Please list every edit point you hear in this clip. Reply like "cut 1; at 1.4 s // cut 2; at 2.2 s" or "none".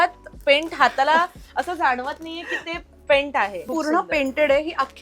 cut 1; at 3.7 s